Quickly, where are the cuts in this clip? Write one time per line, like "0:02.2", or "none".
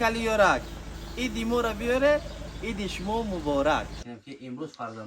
0:04.0

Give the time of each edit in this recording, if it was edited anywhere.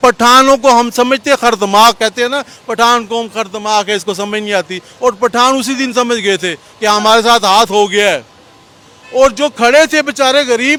none

